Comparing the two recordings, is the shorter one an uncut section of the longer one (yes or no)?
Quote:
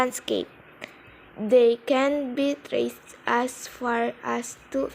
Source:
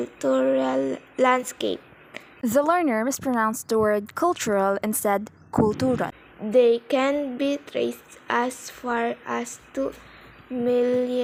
no